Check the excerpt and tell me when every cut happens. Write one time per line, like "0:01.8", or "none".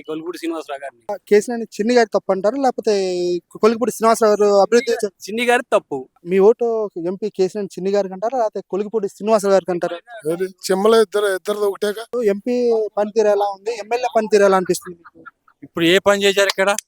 0:01.1
0:06.1
0:12.0